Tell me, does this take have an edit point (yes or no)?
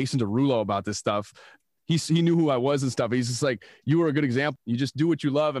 yes